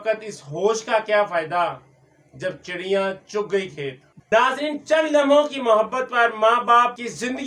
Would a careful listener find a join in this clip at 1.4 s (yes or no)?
no